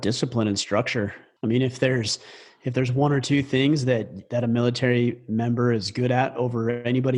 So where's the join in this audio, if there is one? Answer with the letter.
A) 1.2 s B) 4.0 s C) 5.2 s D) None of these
A